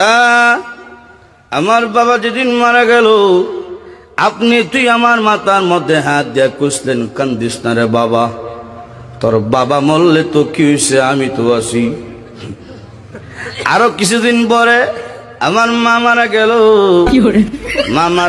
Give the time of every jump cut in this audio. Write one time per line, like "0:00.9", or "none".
none

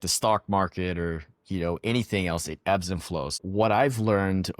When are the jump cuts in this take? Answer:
0:03.4

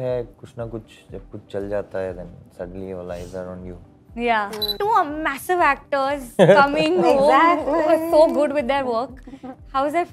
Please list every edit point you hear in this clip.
0:04.7

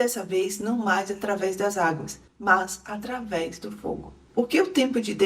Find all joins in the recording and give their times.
0:04.2

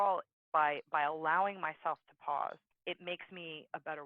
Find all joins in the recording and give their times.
0:02.7

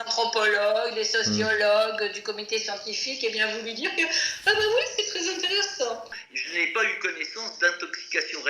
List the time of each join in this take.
0:06.1

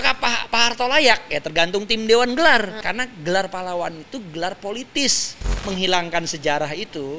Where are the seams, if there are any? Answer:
0:02.8
0:05.5

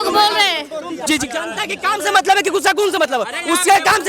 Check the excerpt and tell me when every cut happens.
0:01.1

